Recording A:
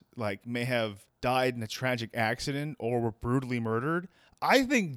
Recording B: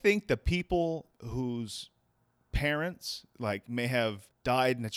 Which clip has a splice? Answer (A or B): B